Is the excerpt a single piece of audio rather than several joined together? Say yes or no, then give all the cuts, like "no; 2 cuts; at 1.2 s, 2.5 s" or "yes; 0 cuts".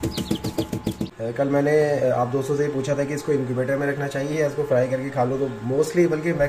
no; 1 cut; at 1.0 s